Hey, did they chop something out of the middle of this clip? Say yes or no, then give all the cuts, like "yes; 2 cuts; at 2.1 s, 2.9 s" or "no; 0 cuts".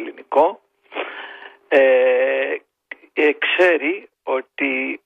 no; 0 cuts